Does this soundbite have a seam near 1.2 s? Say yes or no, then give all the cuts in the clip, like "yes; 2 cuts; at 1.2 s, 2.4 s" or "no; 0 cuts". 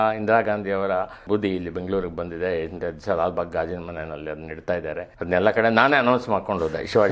yes; 2 cuts; at 1.2 s, 5.1 s